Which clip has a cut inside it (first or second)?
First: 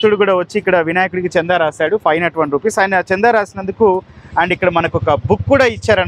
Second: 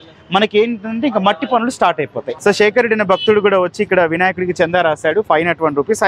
second